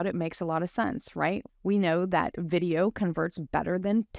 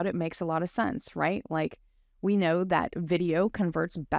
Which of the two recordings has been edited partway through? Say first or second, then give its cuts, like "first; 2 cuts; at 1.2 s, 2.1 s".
first; 1 cut; at 1.4 s